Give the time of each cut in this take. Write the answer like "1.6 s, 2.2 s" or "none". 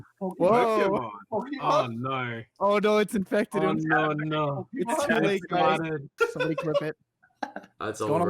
6.1 s